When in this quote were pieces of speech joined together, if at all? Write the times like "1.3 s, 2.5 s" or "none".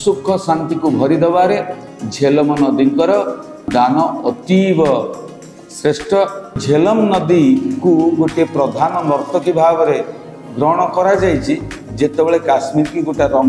3.7 s, 6.6 s